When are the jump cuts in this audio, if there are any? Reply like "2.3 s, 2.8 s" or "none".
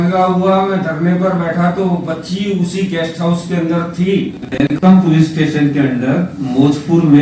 4.8 s